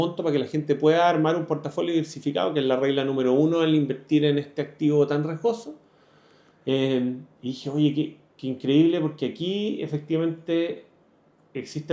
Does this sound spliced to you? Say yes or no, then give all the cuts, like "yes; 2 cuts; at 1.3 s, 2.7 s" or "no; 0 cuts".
no; 0 cuts